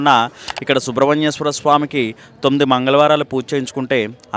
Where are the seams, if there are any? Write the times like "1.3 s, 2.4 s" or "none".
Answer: none